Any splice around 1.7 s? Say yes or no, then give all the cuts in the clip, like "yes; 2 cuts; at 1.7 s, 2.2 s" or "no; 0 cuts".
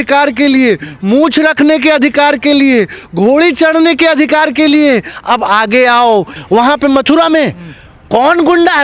no; 1 cut; at 6.3 s